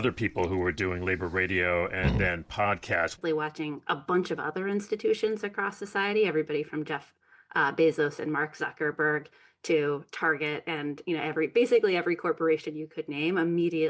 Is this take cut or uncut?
cut